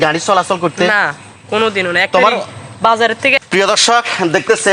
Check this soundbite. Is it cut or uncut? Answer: cut